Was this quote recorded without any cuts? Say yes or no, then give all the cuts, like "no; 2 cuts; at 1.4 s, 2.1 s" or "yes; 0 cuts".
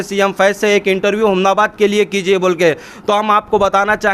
yes; 0 cuts